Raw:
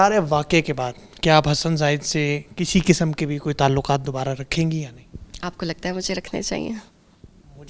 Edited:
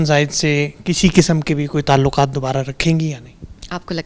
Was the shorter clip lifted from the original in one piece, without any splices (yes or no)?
yes